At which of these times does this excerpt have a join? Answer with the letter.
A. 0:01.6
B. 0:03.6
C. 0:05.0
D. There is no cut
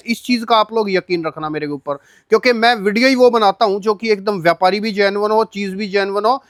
D